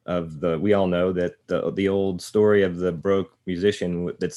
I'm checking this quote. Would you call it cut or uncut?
cut